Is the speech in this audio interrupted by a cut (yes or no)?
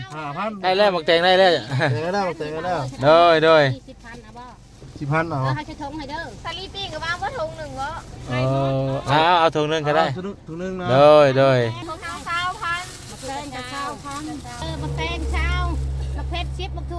yes